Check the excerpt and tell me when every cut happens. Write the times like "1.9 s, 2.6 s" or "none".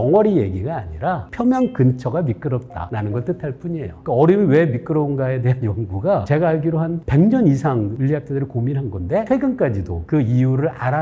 1.3 s, 2.8 s, 3.9 s, 6.2 s, 7.9 s, 9.3 s